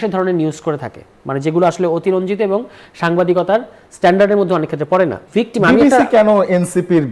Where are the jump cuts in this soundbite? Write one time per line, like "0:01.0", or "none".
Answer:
0:05.2